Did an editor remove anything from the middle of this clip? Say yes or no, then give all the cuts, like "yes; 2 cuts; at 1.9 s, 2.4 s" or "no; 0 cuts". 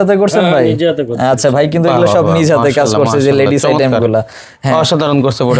no; 0 cuts